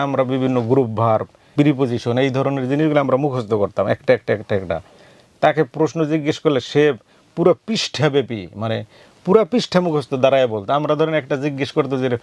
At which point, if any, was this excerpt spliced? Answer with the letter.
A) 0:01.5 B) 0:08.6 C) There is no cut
A